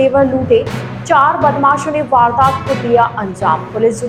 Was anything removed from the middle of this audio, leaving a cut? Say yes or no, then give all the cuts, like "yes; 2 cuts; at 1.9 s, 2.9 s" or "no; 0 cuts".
no; 0 cuts